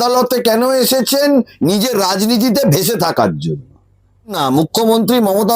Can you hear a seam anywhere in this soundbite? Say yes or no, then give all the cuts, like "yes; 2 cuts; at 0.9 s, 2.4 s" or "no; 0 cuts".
yes; 1 cut; at 4.4 s